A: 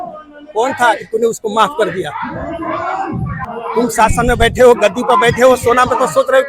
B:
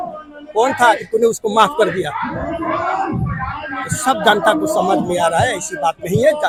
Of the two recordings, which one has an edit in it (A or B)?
A